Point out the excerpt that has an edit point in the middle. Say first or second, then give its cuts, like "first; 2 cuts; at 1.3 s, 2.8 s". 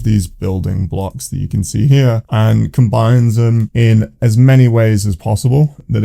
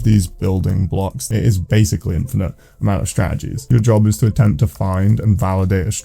second; 2 cuts; at 1.3 s, 3.6 s